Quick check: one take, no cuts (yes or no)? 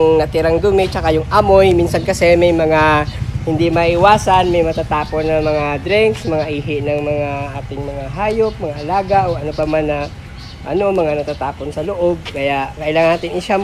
yes